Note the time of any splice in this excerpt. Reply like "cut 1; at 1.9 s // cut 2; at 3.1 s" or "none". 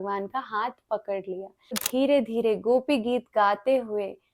cut 1; at 1.8 s